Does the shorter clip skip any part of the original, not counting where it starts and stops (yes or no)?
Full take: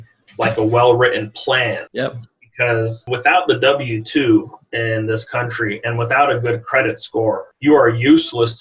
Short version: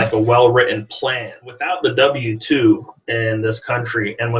yes